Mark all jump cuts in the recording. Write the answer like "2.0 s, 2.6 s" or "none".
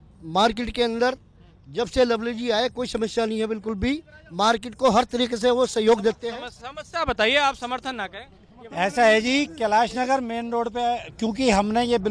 none